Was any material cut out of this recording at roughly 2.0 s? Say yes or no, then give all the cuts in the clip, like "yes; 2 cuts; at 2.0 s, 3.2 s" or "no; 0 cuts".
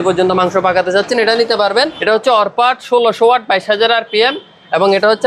yes; 1 cut; at 2.0 s